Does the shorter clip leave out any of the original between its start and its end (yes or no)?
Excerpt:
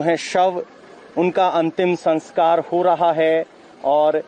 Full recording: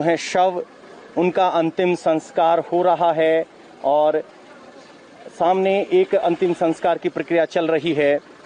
no